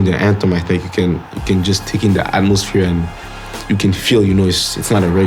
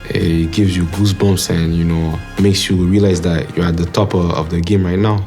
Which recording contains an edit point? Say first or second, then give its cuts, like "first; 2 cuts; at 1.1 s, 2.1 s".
second; 1 cut; at 2.2 s